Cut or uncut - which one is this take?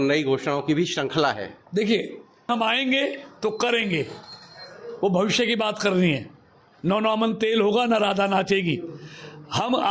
cut